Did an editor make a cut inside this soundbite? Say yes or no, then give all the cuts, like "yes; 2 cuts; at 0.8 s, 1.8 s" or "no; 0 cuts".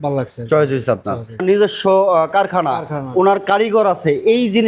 yes; 1 cut; at 1.4 s